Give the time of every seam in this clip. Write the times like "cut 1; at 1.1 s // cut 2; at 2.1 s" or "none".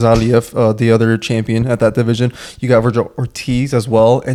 none